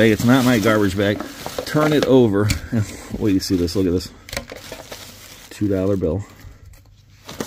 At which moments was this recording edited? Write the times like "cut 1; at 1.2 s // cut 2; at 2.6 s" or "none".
none